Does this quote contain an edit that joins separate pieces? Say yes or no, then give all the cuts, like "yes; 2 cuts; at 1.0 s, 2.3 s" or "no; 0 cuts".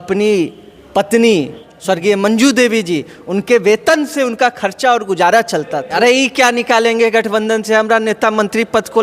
yes; 2 cuts; at 1.6 s, 5.9 s